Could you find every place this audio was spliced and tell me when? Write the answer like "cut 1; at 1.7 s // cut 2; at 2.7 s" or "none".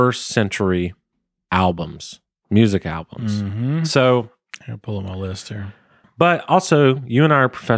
cut 1; at 6.1 s